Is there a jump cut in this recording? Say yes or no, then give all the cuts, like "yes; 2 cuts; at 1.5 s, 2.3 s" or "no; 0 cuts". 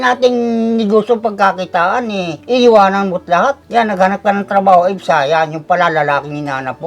yes; 2 cuts; at 2.4 s, 3.6 s